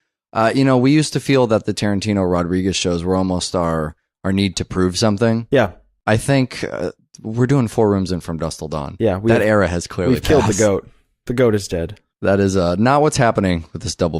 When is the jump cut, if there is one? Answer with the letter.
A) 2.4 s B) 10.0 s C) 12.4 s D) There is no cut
C